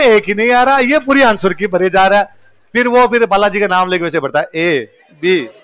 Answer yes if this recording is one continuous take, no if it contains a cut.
yes